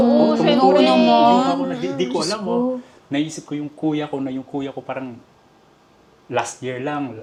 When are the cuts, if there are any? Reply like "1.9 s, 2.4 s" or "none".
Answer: none